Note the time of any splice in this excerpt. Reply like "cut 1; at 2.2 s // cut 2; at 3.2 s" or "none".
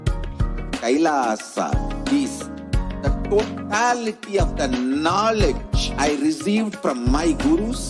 none